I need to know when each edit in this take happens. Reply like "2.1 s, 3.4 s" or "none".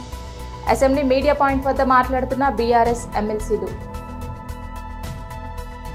none